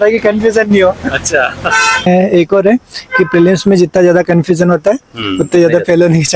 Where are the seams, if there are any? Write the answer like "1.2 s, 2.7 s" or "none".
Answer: 2.1 s